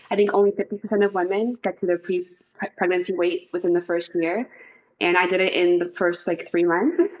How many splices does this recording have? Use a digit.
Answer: 0